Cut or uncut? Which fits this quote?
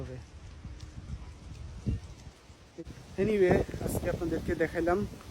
cut